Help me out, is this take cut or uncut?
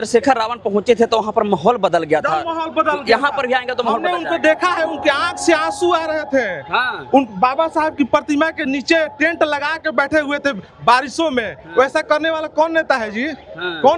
uncut